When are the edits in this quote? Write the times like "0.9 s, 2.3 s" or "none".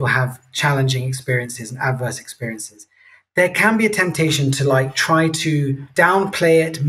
5.8 s